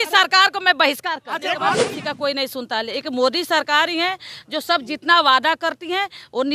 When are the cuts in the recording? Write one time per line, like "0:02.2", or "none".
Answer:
0:01.7